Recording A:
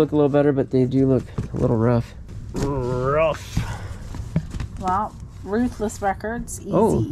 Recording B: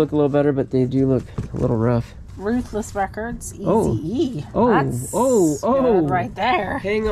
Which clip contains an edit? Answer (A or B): B